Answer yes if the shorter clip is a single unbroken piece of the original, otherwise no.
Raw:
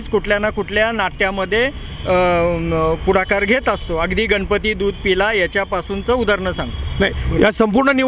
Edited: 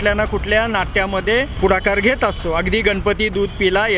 no